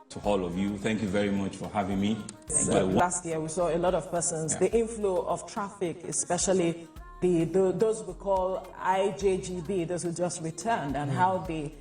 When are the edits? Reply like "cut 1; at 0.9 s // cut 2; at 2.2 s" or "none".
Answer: cut 1; at 3.0 s